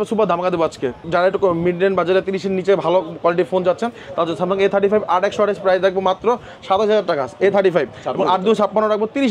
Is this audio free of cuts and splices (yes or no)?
yes